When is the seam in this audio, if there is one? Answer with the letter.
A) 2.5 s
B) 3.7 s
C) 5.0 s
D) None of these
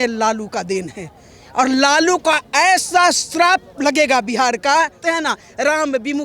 C